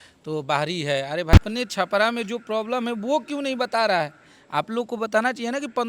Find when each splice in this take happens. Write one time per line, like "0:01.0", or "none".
0:01.4